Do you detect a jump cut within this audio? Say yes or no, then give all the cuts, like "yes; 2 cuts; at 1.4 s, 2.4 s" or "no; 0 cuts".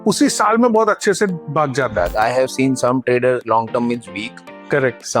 yes; 1 cut; at 2.1 s